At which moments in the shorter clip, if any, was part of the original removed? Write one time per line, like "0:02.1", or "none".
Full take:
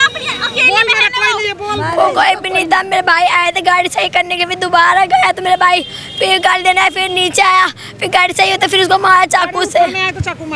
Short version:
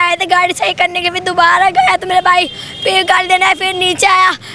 none